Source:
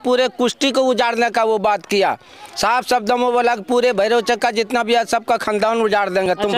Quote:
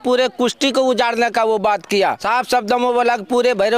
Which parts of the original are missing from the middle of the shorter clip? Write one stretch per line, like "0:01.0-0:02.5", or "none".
0:02.2-0:02.6